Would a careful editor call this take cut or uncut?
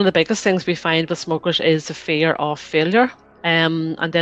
cut